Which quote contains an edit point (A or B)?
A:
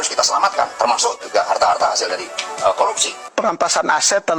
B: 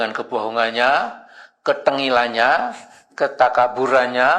A